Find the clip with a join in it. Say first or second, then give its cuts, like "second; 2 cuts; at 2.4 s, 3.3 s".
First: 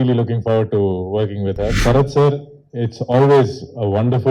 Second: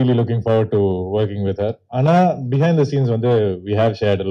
first; 1 cut; at 1.8 s